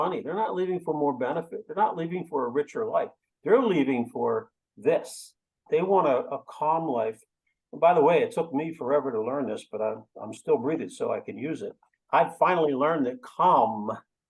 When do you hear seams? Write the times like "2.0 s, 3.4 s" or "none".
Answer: none